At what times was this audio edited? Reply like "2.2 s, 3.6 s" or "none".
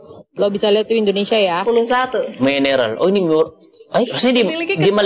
1.6 s, 4.1 s